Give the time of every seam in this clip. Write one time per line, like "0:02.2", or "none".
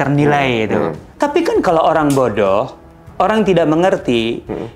0:01.0